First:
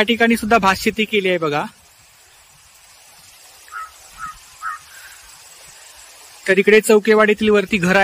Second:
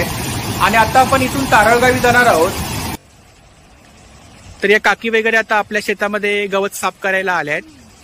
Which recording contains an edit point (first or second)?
second